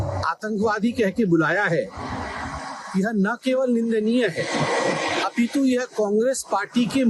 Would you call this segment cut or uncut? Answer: uncut